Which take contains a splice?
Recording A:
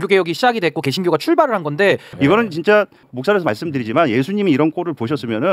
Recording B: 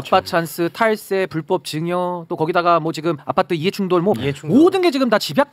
A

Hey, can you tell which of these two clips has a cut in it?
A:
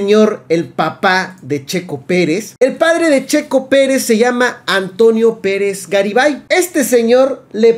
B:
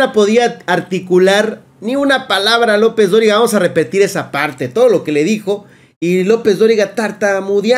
A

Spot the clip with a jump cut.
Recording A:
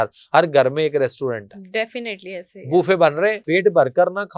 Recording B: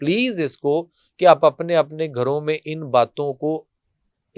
A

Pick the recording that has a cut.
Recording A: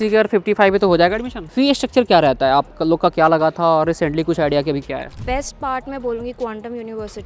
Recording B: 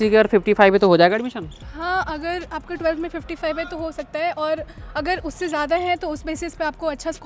A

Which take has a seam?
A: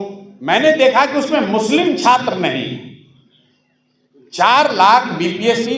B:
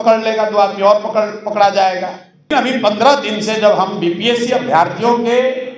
B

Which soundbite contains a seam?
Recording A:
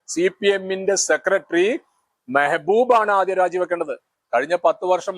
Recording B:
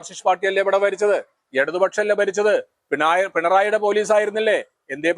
A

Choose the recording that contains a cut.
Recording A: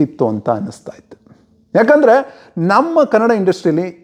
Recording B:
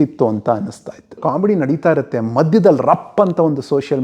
B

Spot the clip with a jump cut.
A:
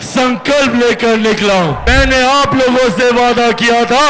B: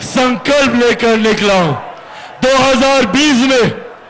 A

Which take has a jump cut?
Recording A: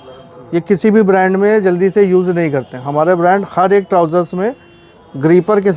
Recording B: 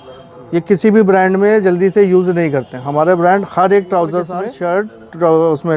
B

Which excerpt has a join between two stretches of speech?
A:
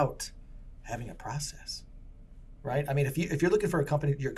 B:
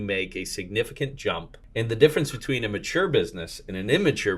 B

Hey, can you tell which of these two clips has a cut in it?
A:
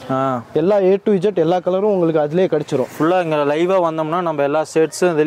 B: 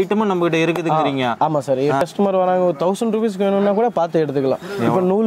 B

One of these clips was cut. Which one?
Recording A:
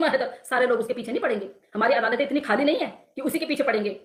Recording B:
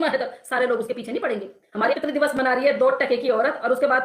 B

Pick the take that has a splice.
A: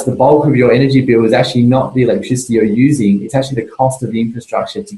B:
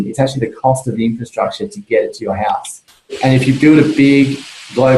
B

